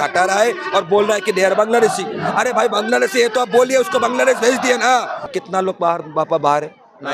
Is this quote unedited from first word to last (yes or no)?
no